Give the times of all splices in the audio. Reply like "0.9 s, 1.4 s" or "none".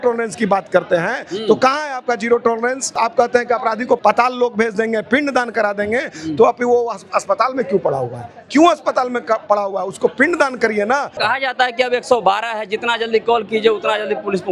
2.9 s, 4.0 s, 11.2 s